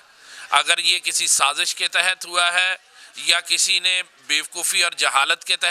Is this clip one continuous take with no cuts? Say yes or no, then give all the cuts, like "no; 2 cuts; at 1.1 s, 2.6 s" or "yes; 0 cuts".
yes; 0 cuts